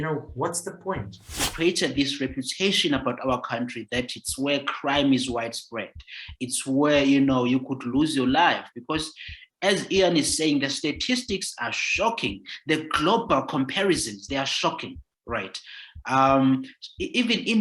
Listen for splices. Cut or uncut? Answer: cut